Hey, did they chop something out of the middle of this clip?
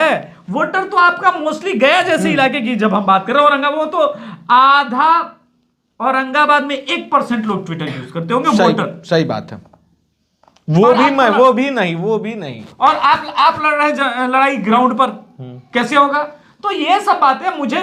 no; 0 cuts

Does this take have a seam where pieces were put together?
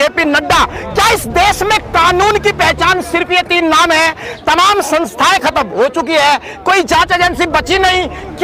no; 0 cuts

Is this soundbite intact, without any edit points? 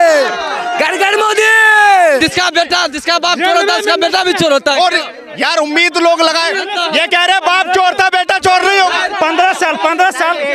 no; 1 cut; at 2.2 s

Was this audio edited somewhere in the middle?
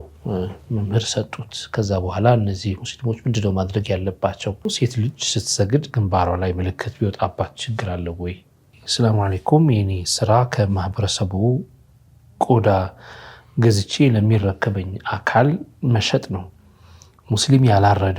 yes; 2 cuts; at 4.7 s, 8.8 s

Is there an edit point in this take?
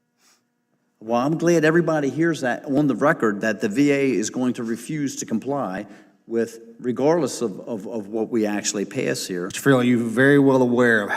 yes; 1 cut; at 9.6 s

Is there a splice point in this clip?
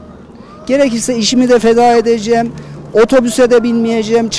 no; 0 cuts

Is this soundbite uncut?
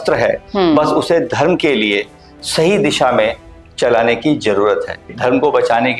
no; 1 cut; at 5.1 s

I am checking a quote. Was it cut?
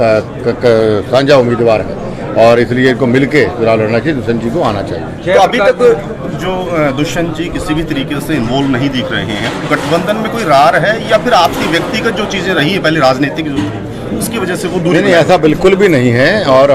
no; 0 cuts

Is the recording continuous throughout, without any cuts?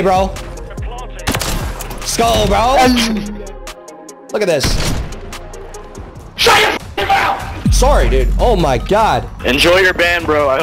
no; 1 cut; at 9.4 s

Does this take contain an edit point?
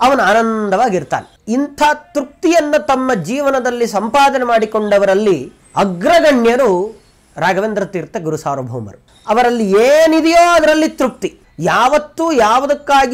no; 0 cuts

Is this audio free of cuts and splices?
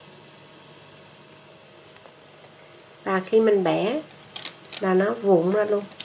yes; 0 cuts

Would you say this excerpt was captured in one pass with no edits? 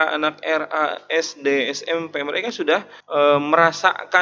no; 1 cut; at 3.0 s

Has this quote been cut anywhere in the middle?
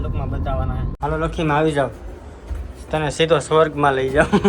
yes; 1 cut; at 0.9 s

